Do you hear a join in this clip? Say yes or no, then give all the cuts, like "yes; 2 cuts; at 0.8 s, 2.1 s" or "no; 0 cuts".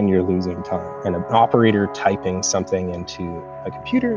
yes; 1 cut; at 0.9 s